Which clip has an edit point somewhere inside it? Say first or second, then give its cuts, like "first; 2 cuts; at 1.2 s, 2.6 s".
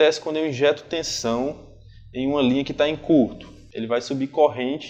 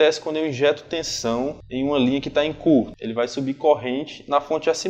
second; 2 cuts; at 1.6 s, 3.0 s